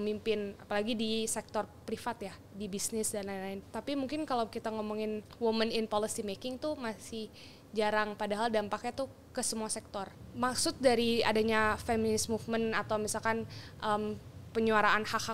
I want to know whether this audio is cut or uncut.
cut